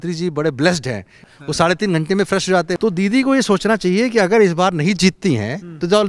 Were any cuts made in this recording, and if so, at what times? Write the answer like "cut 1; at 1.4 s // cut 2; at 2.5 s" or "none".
cut 1; at 1.3 s // cut 2; at 2.8 s